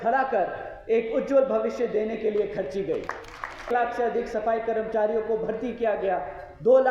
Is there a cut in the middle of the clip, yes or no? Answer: yes